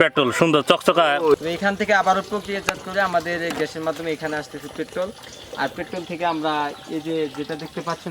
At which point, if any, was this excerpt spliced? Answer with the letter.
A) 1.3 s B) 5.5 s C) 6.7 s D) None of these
A